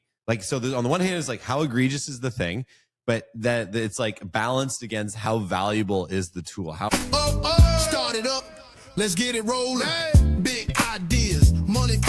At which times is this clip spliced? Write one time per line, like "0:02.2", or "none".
0:06.9